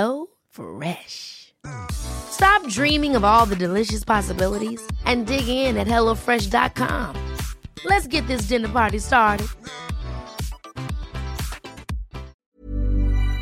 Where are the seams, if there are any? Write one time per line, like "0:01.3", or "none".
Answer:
0:12.4